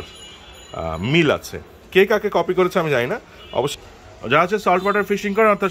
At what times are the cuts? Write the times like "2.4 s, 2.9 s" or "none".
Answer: 3.7 s